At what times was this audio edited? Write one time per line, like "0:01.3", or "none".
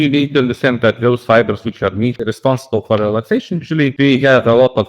0:02.2
0:03.9